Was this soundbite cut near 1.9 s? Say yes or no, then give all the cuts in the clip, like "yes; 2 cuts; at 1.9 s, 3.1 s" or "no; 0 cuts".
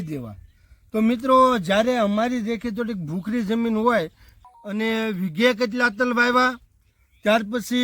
no; 1 cut; at 4.3 s